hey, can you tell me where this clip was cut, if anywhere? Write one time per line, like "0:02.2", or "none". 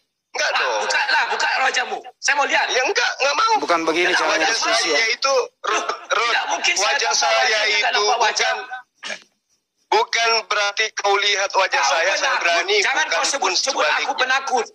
none